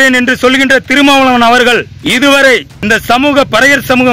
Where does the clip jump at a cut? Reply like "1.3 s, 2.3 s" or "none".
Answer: 2.0 s, 2.7 s